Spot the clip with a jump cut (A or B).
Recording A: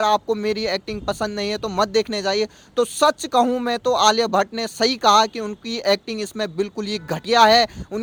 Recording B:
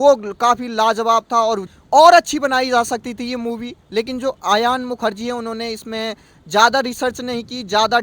B